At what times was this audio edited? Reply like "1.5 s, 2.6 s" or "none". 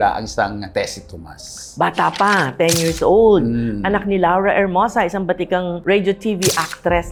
none

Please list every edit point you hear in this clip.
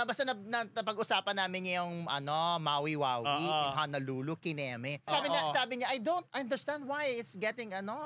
5.1 s

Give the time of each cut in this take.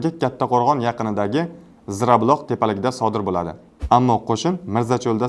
3.7 s

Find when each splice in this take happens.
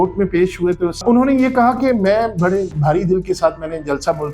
1.0 s

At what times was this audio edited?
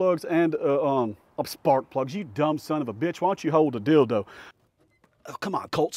4.4 s

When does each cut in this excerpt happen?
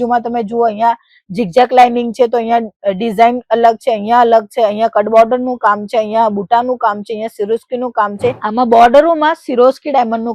8.4 s

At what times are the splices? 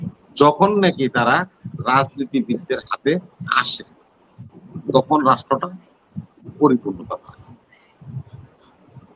none

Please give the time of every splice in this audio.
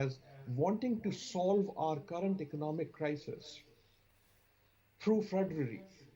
none

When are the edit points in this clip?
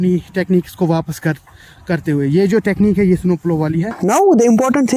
4.0 s

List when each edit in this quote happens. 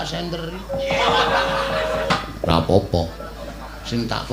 2.1 s

